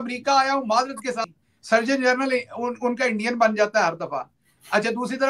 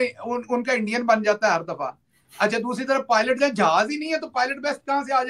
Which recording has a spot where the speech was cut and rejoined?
first; 1 cut; at 1.2 s

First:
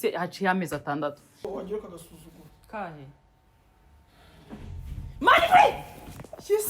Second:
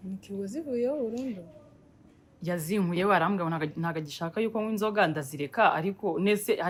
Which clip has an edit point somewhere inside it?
first; 1 cut; at 1.3 s

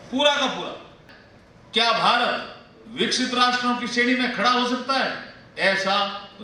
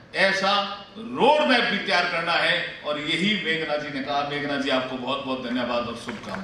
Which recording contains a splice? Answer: first; 1 cut; at 1.0 s

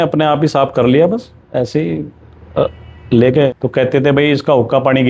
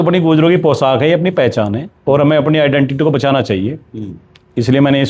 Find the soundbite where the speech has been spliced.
first; 1 cut; at 3.5 s

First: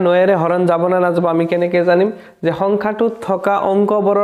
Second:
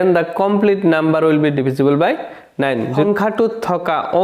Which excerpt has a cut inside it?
second; 1 cut; at 3.0 s

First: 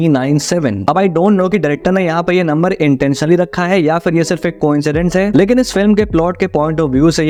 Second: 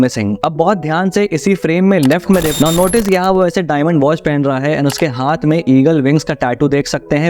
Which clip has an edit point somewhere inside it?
second; 1 cut; at 2.5 s

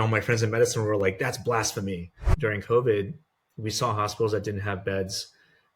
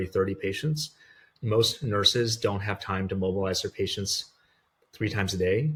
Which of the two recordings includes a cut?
first; 1 cut; at 2.3 s

